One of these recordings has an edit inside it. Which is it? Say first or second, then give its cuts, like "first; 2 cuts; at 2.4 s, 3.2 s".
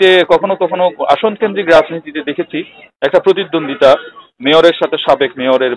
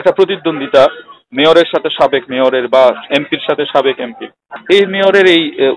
second; 1 cut; at 4.5 s